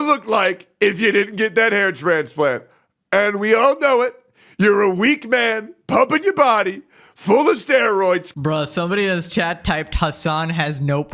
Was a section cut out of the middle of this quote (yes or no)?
no